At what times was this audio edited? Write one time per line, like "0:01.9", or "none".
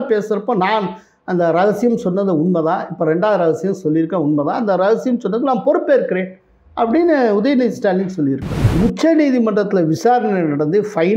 0:08.6